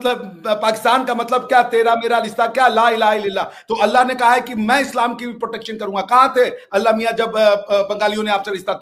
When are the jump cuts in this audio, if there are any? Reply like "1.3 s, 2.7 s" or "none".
none